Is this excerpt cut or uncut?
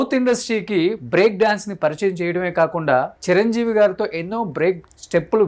uncut